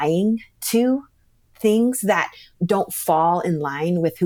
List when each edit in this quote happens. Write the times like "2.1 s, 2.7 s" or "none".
none